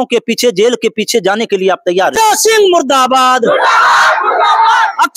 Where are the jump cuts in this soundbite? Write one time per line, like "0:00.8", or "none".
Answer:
none